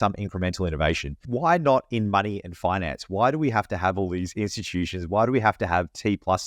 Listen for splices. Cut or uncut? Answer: cut